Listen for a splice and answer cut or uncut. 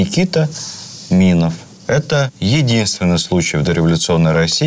uncut